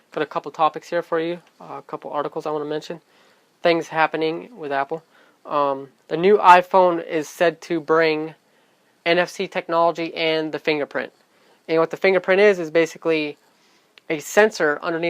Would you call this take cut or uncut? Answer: cut